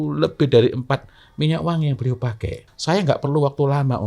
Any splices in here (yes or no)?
yes